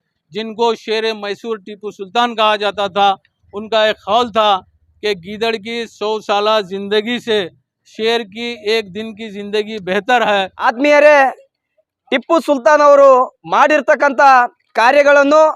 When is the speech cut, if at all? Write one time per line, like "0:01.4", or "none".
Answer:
0:10.5